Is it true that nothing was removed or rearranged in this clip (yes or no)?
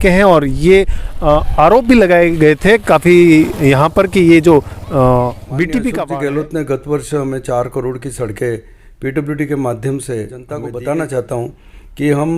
no